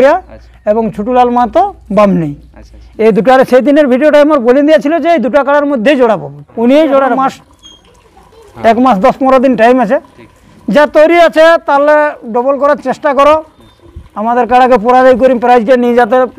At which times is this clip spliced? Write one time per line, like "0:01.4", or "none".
0:06.4
0:07.2